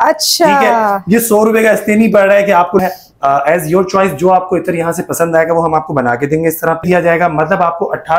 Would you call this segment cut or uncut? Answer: cut